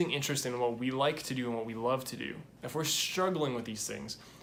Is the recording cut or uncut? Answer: cut